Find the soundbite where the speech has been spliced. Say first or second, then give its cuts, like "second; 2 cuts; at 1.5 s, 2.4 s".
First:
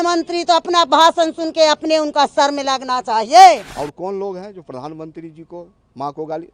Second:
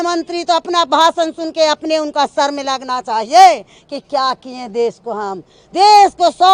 first; 1 cut; at 3.7 s